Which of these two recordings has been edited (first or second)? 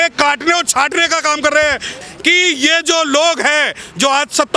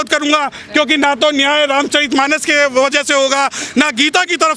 first